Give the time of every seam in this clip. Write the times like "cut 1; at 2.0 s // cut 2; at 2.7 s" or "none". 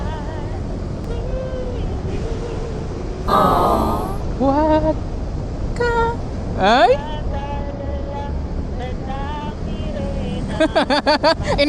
cut 1; at 1.1 s

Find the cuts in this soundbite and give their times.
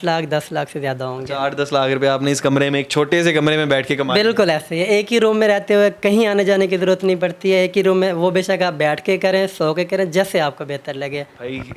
none

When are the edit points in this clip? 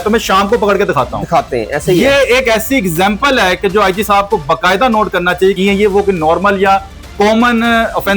cut 1; at 5.6 s

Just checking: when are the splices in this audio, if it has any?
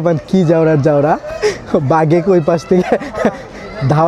none

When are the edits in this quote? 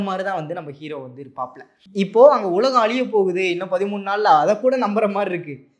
cut 1; at 1.8 s

